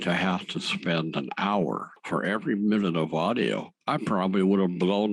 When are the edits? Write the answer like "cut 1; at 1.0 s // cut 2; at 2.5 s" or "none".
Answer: none